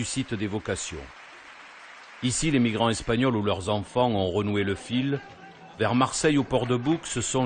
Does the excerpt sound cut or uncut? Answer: cut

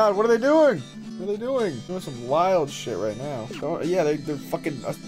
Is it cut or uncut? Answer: cut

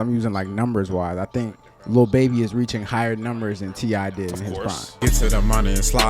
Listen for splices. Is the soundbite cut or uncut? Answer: cut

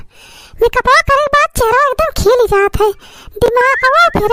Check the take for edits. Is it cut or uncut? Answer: uncut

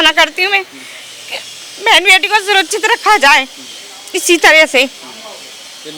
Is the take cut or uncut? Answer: uncut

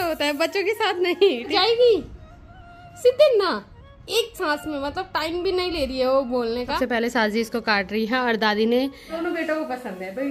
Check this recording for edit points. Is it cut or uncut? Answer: cut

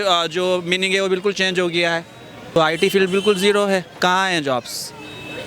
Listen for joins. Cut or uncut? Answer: cut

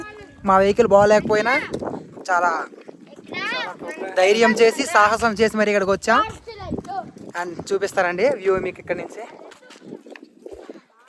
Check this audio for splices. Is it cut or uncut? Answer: uncut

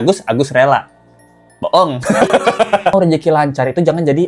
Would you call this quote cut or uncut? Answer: cut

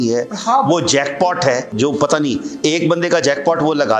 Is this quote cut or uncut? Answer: cut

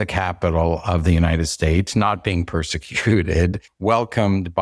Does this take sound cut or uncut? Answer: cut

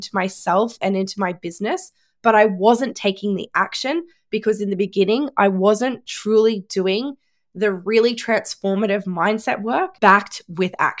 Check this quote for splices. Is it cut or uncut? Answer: cut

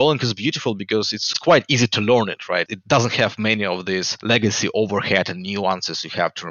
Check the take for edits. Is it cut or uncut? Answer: cut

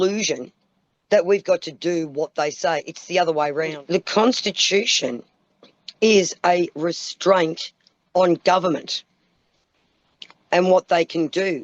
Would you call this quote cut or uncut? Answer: cut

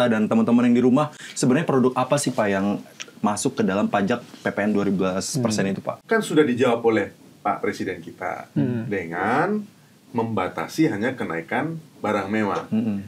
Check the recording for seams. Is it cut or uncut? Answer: cut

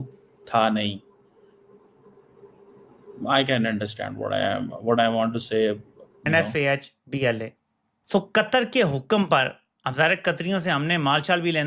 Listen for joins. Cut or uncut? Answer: cut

